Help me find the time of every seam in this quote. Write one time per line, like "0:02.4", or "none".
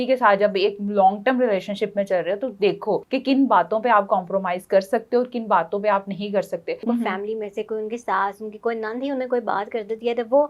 0:03.1
0:06.8